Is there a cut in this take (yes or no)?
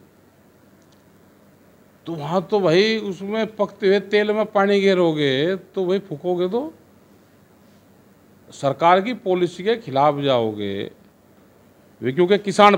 no